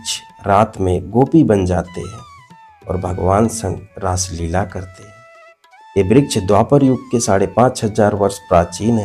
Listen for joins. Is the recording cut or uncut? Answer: uncut